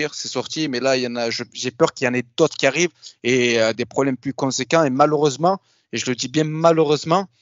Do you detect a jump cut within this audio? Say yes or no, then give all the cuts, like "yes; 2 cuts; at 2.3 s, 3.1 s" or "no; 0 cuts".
no; 0 cuts